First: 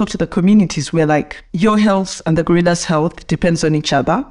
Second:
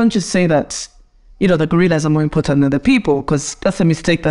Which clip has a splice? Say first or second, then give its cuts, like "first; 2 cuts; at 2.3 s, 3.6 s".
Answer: first; 1 cut; at 1.4 s